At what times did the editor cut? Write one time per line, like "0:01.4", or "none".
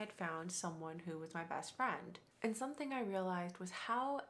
0:02.2